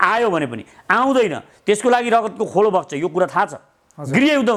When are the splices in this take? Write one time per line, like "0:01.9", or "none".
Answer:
none